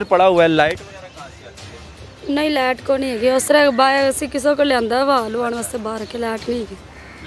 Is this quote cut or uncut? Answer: uncut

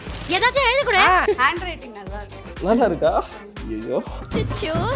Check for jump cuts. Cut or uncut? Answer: cut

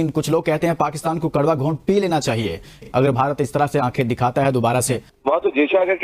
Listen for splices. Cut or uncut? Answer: cut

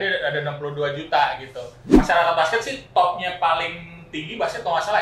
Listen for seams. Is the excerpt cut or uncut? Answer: cut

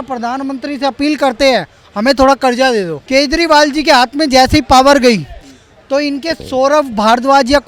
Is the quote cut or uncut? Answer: cut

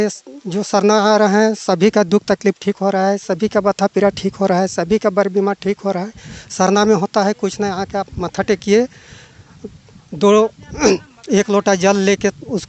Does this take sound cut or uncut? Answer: uncut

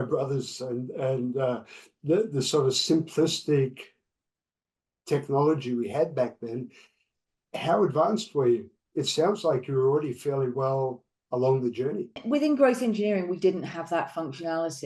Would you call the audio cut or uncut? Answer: cut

